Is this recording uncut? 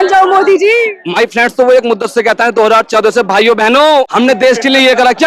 no; 2 cuts; at 1.0 s, 4.1 s

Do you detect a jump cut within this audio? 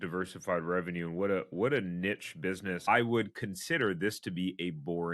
yes; 1 cut; at 2.8 s

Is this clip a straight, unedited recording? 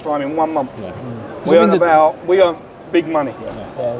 yes; 0 cuts

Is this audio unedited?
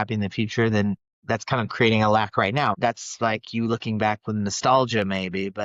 no; 1 cut; at 2.8 s

